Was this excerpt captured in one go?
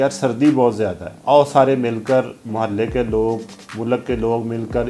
no; 1 cut; at 1.1 s

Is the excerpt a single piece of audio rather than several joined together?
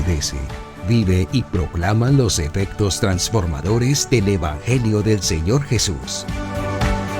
no; 1 cut; at 6.1 s

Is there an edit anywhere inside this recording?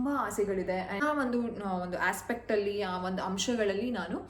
yes; 1 cut; at 1.0 s

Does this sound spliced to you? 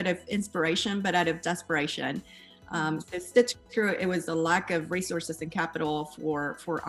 no; 0 cuts

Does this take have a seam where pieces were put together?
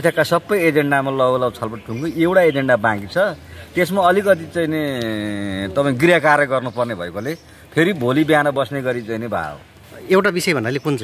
no; 0 cuts

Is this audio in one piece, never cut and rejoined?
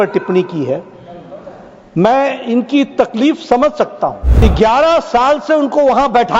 no; 1 cut; at 4.4 s

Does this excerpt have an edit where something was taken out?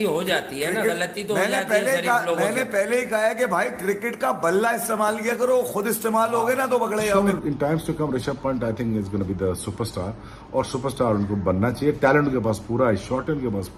yes; 1 cut; at 7.2 s

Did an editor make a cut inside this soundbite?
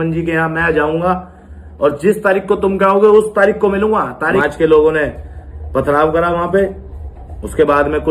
yes; 1 cut; at 4.4 s

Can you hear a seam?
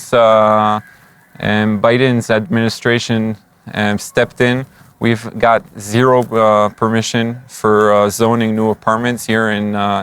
no; 0 cuts

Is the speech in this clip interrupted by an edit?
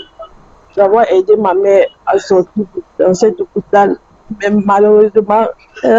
no; 0 cuts

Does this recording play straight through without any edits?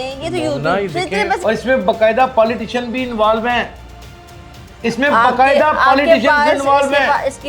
no; 1 cut; at 1.4 s

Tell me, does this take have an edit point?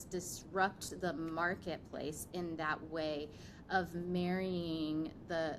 no; 0 cuts

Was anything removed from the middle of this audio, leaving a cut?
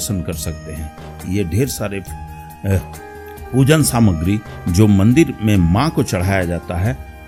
no; 0 cuts

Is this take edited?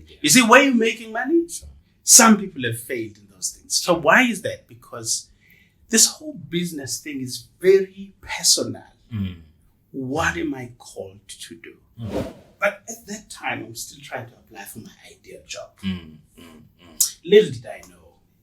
yes; 1 cut; at 12.4 s

